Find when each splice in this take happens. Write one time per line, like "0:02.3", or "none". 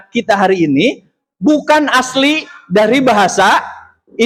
none